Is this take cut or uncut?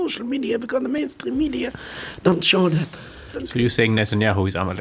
cut